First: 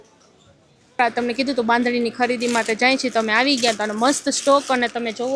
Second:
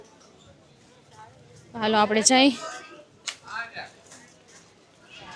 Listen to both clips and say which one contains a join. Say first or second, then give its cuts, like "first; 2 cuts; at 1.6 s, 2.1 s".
first; 1 cut; at 1.0 s